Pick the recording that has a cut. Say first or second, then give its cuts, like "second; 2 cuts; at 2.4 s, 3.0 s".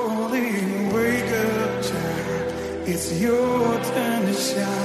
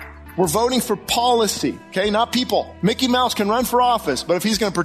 second; 2 cuts; at 1.8 s, 2.7 s